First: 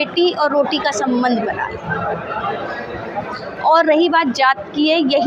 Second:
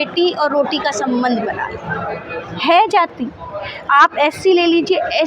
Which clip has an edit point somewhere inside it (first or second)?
second